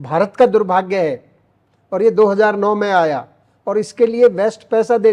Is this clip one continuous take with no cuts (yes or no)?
yes